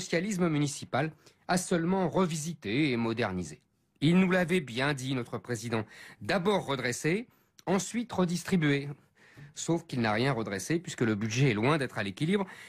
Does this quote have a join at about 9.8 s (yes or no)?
no